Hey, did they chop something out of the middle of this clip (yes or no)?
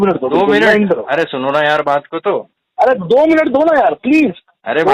no